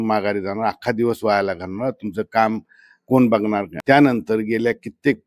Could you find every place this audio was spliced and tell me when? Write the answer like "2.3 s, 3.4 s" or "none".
3.7 s